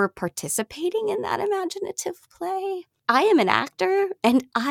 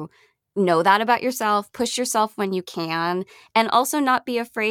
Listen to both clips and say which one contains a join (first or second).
first